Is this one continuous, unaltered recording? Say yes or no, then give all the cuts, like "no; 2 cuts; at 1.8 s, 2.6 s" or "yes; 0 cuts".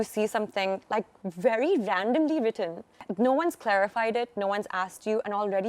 no; 1 cut; at 3.0 s